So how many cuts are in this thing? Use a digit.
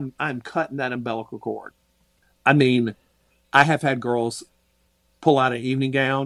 1